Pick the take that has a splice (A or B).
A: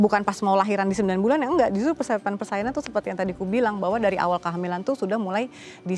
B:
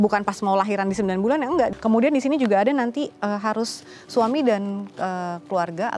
B